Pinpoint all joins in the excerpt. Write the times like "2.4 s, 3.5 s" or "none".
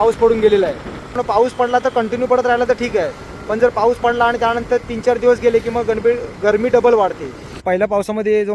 1.2 s, 7.6 s